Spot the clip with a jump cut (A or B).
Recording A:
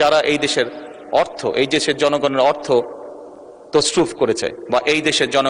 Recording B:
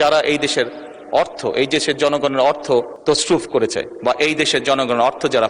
B